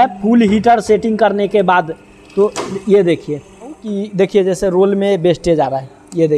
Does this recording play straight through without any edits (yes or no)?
no